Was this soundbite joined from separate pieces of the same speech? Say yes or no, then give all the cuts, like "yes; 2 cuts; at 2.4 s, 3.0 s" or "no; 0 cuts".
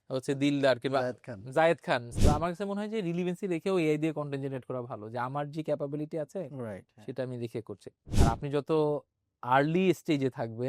yes; 2 cuts; at 2.1 s, 8.0 s